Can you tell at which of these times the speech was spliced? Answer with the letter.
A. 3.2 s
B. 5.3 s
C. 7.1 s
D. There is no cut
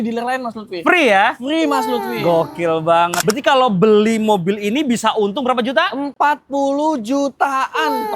A